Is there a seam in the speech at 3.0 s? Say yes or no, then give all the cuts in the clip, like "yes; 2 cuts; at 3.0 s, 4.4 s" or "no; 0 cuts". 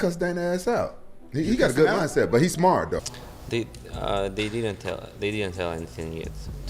yes; 1 cut; at 3.0 s